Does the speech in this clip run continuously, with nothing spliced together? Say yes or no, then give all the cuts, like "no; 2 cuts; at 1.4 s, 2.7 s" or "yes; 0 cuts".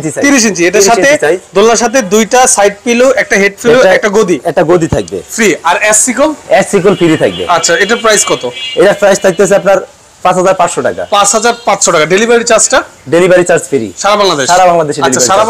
yes; 0 cuts